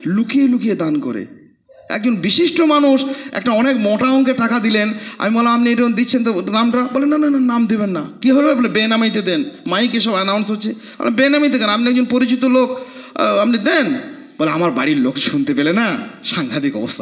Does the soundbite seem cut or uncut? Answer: uncut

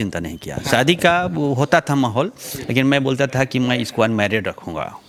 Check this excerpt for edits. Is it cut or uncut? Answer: uncut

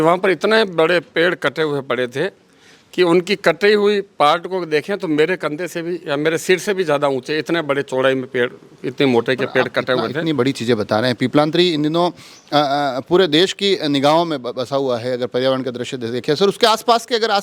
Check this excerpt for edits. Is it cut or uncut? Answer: uncut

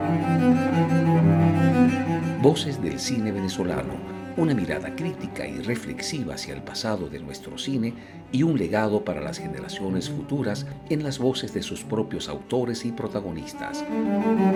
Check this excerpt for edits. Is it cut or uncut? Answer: uncut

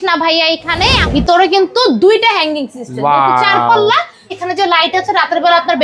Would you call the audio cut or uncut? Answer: cut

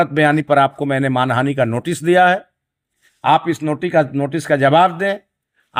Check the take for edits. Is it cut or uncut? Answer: uncut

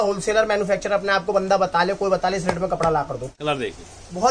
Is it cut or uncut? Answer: cut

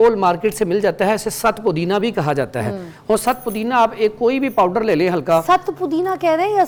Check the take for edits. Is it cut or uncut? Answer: uncut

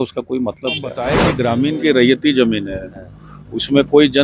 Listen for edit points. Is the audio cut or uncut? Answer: cut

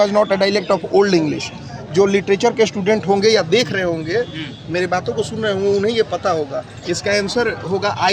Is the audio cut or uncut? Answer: uncut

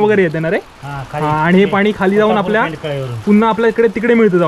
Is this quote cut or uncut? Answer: uncut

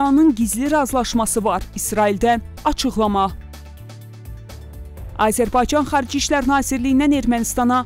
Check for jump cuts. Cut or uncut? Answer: uncut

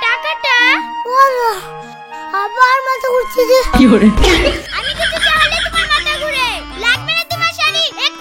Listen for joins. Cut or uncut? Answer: uncut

